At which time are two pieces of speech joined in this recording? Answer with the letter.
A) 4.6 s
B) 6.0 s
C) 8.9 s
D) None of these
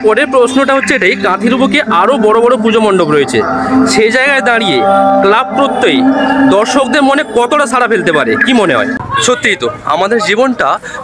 C